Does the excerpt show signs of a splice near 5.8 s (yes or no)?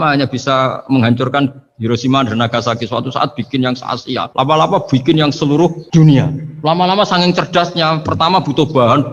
yes